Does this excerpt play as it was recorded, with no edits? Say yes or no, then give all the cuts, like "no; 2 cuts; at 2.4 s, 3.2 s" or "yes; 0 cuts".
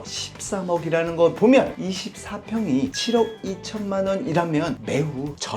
no; 1 cut; at 1.8 s